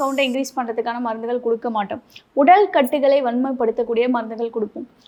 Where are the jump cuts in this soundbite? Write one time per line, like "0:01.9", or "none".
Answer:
none